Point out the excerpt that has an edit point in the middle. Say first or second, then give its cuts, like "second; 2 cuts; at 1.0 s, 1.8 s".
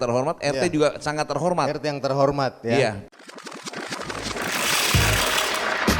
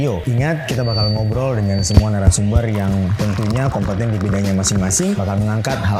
first; 1 cut; at 3.0 s